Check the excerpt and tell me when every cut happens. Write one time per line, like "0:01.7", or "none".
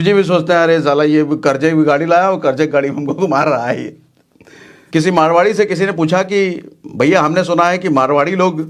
0:04.8